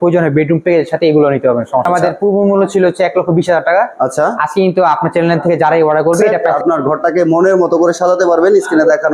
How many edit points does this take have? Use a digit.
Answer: 2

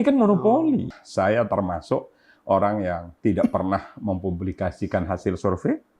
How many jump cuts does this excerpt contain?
1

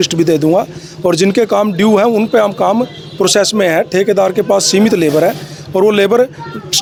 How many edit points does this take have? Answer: 0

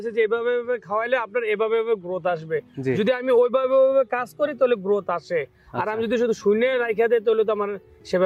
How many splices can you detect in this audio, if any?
0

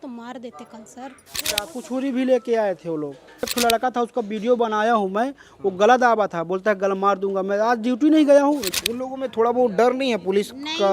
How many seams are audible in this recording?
3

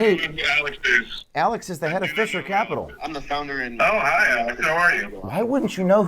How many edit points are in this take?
1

